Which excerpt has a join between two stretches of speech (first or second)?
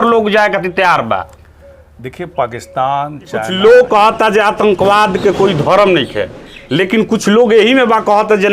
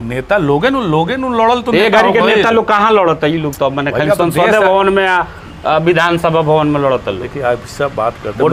first